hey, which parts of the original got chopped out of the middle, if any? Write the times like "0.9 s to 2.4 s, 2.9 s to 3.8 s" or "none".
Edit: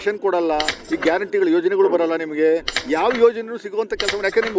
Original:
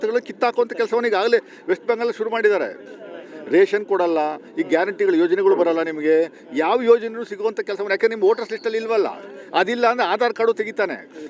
none